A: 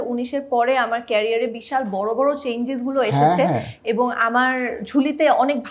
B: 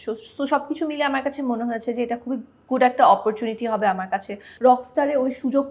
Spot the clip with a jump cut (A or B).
B